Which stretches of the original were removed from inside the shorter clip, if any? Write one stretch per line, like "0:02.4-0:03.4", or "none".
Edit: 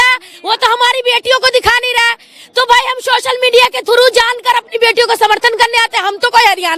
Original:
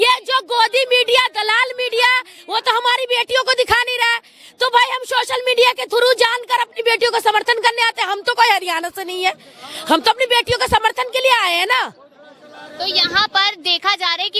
none